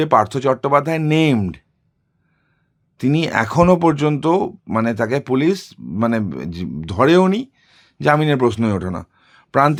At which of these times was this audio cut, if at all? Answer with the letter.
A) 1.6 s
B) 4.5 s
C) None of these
C